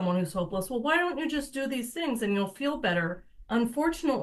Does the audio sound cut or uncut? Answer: uncut